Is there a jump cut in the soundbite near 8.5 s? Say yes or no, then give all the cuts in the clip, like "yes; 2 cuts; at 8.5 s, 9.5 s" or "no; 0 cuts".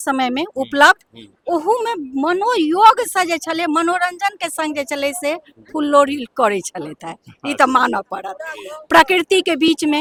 no; 0 cuts